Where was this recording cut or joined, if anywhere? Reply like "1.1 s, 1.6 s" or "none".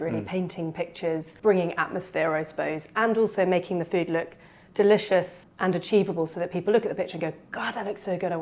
1.3 s, 5.4 s